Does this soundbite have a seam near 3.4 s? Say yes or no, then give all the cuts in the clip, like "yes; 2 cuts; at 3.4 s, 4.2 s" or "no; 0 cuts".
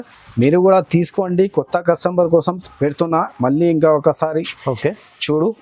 no; 0 cuts